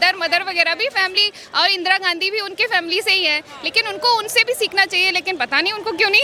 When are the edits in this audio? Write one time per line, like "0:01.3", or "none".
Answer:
none